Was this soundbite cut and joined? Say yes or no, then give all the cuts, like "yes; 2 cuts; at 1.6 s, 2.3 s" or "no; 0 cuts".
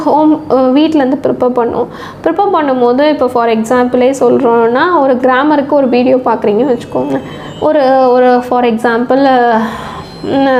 no; 0 cuts